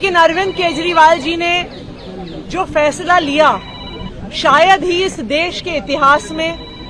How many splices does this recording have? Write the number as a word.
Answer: zero